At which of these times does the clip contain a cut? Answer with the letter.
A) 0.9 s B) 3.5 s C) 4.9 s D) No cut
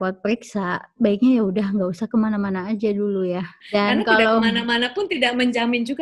B